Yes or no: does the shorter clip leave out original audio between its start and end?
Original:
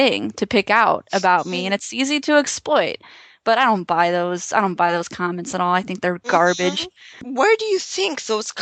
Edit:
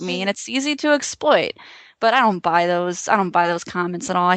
no